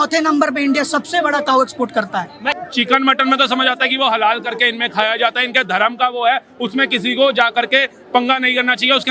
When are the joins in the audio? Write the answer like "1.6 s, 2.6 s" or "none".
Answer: 2.6 s